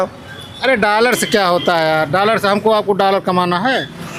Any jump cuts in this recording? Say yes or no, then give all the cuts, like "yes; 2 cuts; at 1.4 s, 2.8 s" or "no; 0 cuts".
no; 0 cuts